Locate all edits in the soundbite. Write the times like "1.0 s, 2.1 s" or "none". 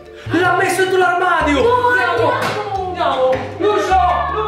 none